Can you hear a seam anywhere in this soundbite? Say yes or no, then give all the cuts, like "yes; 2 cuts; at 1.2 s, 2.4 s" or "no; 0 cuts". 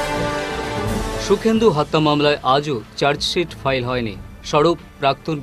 no; 0 cuts